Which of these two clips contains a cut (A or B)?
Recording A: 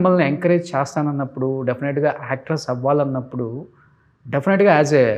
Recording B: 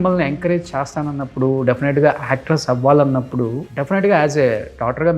B